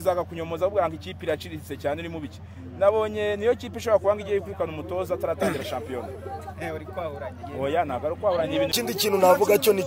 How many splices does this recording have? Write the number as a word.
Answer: one